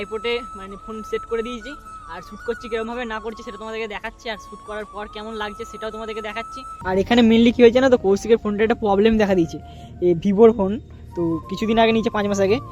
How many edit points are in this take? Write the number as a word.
one